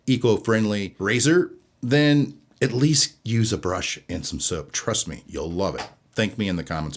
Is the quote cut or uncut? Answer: cut